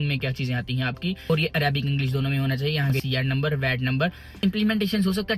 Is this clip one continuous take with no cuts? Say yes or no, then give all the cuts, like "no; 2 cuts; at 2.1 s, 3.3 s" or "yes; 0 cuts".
no; 3 cuts; at 1.3 s, 3.0 s, 4.4 s